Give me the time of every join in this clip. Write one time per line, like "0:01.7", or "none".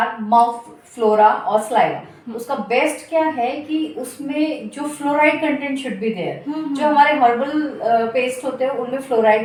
none